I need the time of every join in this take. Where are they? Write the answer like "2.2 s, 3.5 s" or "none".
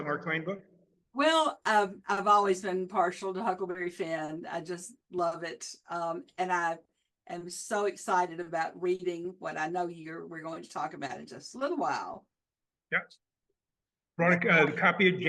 none